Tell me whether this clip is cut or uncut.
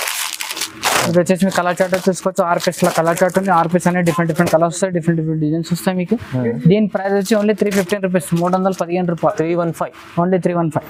uncut